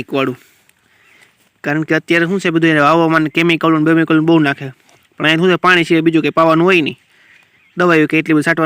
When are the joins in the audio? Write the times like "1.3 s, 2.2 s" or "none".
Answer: none